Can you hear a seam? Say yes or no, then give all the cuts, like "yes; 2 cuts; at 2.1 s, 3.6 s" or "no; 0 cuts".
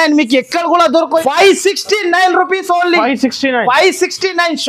yes; 1 cut; at 1.1 s